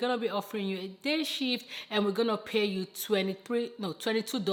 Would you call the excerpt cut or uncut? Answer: uncut